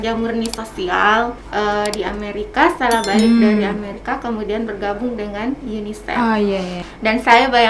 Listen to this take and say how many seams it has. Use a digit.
2